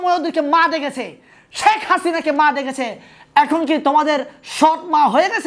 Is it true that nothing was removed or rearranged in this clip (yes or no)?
yes